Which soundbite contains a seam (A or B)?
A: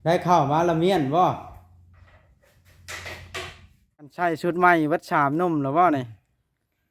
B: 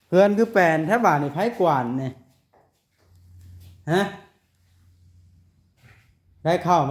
A